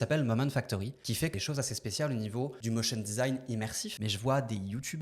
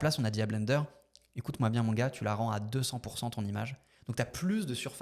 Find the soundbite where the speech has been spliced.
first; 3 cuts; at 1.3 s, 2.6 s, 3.9 s

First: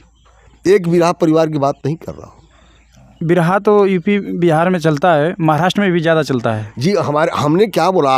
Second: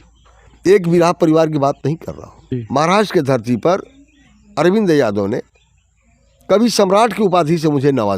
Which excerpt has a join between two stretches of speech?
second; 1 cut; at 2.6 s

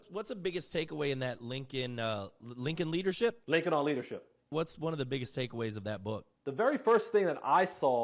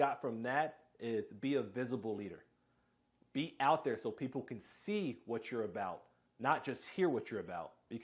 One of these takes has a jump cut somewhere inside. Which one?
first; 3 cuts; at 3.4 s, 4.5 s, 6.3 s

